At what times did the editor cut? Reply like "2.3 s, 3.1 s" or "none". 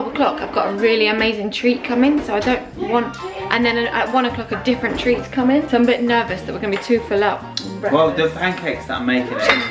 none